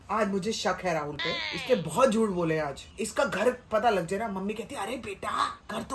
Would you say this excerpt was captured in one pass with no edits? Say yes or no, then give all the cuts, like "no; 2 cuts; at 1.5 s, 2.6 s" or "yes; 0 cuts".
yes; 0 cuts